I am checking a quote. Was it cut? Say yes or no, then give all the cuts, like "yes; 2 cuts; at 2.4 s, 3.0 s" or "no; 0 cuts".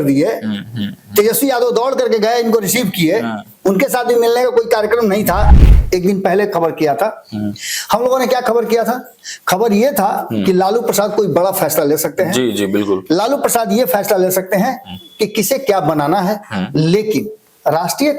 yes; 1 cut; at 5.5 s